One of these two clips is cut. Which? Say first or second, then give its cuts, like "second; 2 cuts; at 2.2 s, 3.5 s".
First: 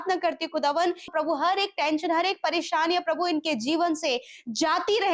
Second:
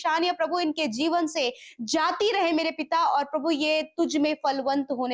first; 1 cut; at 1.1 s